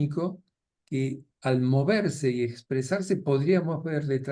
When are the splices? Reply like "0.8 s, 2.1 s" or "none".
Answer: 1.3 s